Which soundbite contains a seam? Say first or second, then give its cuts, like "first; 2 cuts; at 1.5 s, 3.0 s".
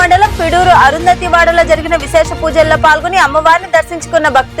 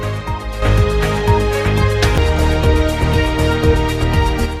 second; 1 cut; at 2.1 s